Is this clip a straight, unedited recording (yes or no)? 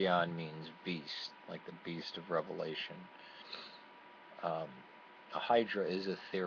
no